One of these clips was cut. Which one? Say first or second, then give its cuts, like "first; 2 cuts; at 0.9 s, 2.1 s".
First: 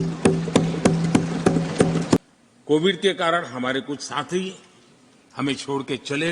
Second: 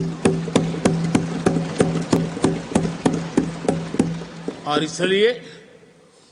first; 1 cut; at 2.2 s